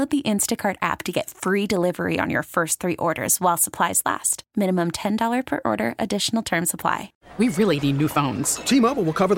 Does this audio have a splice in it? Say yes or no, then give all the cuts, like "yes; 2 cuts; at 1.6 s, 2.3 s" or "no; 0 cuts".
yes; 1 cut; at 7.2 s